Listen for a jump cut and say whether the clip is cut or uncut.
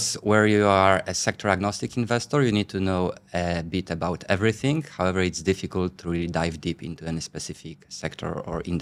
uncut